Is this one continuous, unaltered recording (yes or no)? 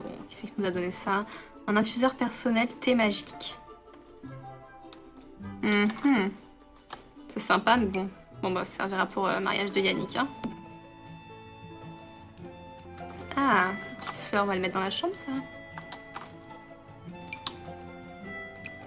yes